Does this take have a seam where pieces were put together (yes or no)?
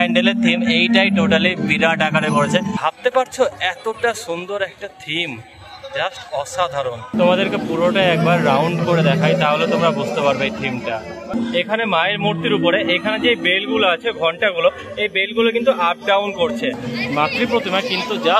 yes